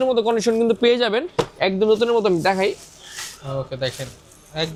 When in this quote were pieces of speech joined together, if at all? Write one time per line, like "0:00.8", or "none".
none